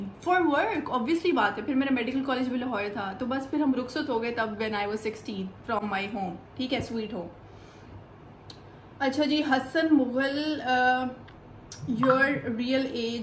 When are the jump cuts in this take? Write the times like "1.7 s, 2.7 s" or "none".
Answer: none